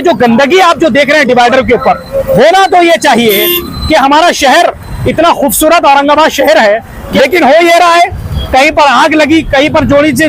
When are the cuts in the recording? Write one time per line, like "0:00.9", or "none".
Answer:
0:07.0